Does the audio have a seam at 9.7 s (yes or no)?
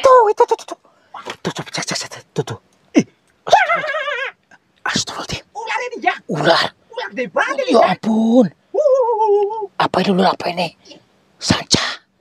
no